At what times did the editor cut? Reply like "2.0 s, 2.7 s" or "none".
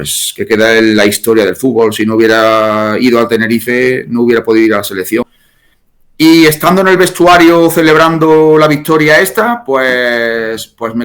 5.2 s